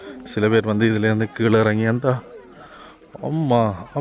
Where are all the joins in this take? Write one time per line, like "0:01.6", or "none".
none